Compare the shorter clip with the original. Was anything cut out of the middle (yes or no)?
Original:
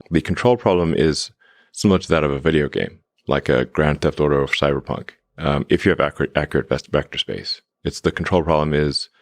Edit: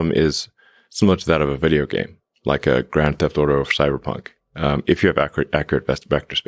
no